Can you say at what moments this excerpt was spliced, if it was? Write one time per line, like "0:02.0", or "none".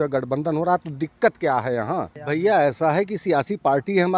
0:02.2